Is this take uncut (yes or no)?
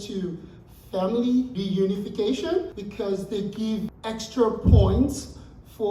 no